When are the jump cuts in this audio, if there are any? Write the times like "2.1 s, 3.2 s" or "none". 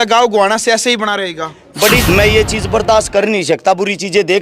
2.0 s